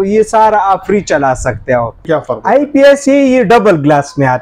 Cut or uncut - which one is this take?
cut